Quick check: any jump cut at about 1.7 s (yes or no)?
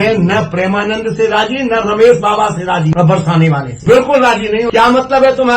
no